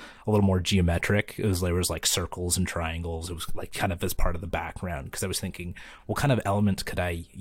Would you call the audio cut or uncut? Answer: uncut